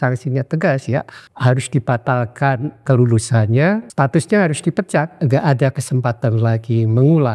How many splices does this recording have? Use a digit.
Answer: 4